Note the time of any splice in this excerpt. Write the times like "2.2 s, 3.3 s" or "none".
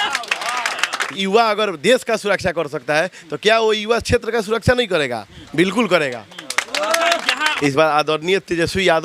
1.1 s, 7.5 s